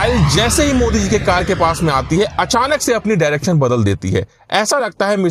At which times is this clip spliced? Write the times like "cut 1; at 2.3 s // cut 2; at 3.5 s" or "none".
none